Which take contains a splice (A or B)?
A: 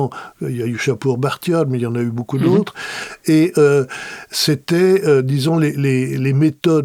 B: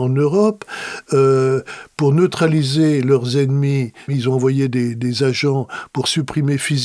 B